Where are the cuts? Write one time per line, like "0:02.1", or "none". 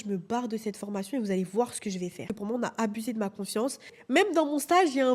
0:02.2
0:03.9